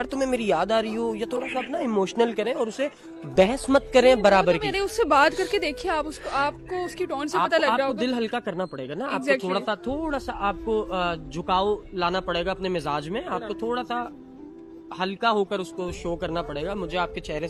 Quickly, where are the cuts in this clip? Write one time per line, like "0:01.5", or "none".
none